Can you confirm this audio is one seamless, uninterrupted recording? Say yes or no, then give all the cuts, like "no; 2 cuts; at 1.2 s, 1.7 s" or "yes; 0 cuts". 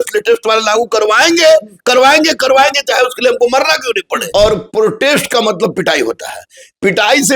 no; 1 cut; at 4.2 s